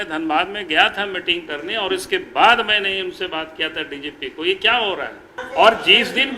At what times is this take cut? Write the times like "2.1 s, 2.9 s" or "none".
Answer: 5.4 s